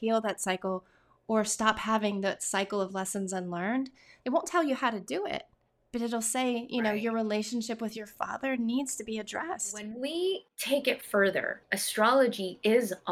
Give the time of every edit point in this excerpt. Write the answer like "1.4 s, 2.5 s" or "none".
4.1 s, 9.9 s